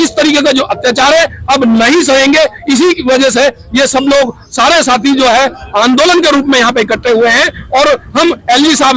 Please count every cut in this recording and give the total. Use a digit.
0